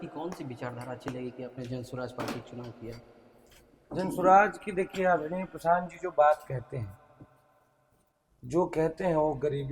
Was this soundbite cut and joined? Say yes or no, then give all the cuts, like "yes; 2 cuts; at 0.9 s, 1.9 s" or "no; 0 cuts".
no; 0 cuts